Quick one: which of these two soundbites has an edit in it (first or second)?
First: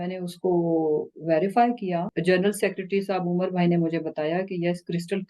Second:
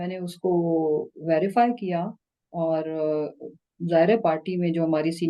first